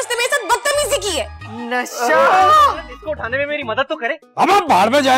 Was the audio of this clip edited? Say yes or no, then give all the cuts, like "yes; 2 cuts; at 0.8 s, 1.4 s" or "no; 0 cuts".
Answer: yes; 1 cut; at 2.9 s